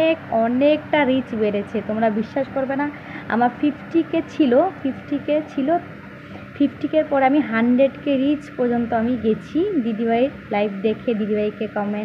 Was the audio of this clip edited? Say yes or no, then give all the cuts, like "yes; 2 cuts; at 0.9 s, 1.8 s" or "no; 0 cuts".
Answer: no; 0 cuts